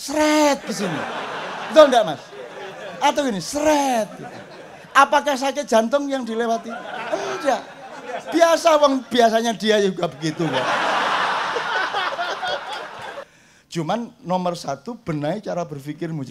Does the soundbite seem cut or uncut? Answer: cut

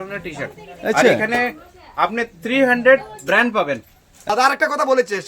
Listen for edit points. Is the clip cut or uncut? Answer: cut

